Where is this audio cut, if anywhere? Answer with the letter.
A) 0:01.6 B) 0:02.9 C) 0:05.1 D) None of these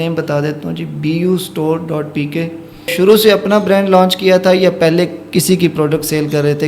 B